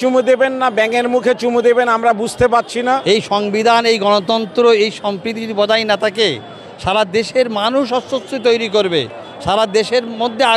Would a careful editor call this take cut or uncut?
cut